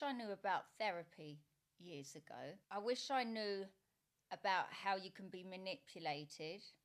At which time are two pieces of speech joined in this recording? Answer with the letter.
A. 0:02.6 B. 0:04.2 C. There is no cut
A